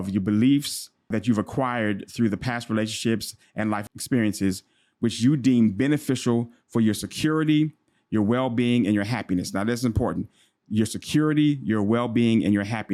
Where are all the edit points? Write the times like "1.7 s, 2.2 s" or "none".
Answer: none